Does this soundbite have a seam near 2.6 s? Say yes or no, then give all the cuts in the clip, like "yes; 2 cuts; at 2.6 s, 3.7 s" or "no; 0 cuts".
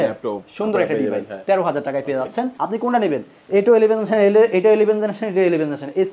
yes; 1 cut; at 2.6 s